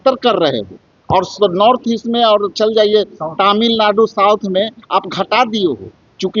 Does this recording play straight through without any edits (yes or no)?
yes